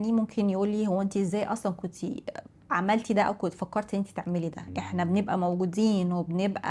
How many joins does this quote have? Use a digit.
0